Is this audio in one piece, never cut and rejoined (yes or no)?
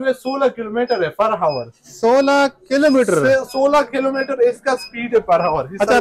yes